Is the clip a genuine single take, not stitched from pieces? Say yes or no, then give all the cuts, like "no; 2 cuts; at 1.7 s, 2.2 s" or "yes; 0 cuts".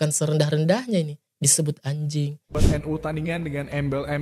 no; 1 cut; at 2.6 s